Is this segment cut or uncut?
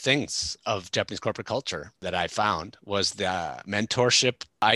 uncut